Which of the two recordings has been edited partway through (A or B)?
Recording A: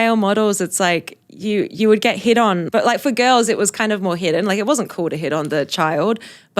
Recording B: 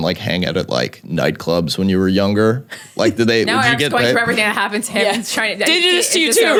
A